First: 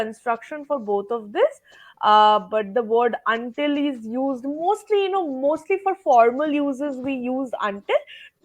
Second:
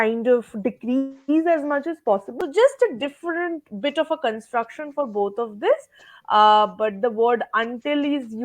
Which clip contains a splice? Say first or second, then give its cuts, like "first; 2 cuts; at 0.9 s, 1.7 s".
second; 1 cut; at 2.3 s